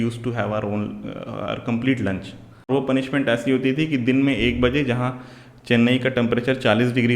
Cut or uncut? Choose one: cut